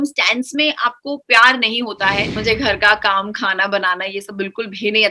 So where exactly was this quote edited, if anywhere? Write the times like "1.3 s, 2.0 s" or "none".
2.4 s

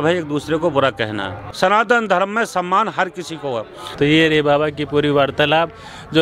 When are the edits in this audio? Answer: none

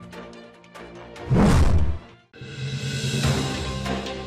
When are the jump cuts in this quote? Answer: none

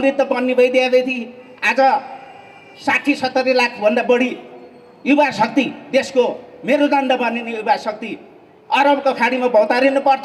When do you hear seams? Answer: none

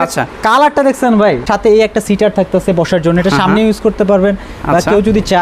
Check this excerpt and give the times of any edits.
1.4 s

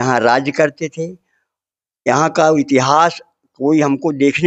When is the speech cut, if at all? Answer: none

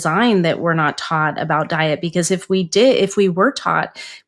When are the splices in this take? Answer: none

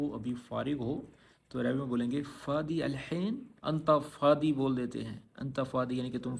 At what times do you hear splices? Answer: 3.5 s

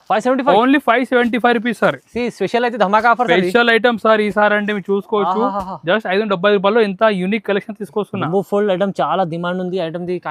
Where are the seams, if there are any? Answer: none

